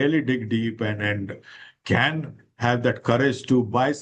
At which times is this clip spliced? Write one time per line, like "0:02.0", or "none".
none